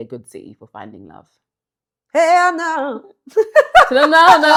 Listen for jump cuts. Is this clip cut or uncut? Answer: uncut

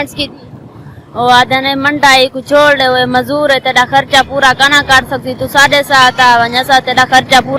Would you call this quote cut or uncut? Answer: uncut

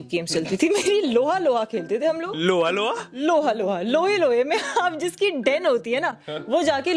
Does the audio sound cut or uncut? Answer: uncut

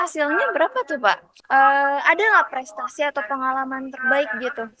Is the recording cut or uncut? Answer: cut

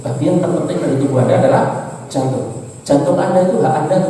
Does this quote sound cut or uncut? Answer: uncut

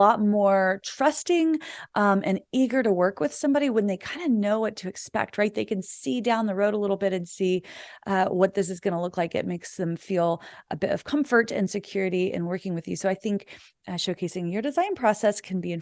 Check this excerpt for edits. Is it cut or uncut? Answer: uncut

